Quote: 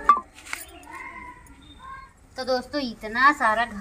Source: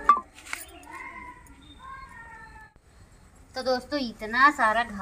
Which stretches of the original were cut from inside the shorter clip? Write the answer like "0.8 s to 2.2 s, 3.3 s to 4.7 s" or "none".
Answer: 2.1 s to 3.3 s